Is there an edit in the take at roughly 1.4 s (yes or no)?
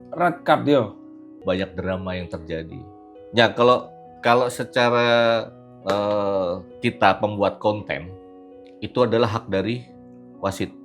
yes